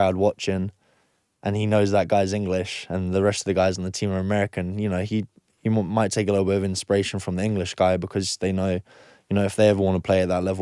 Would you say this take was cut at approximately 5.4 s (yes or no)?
no